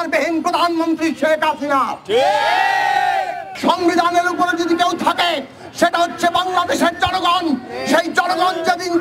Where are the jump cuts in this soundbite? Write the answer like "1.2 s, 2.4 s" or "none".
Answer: 3.4 s